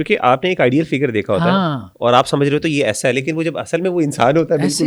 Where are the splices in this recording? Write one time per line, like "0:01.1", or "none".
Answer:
none